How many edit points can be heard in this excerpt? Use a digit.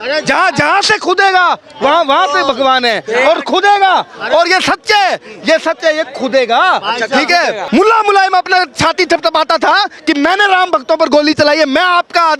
1